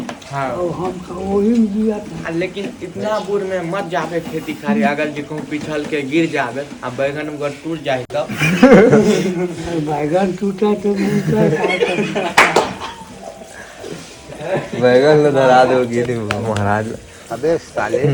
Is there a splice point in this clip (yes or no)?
no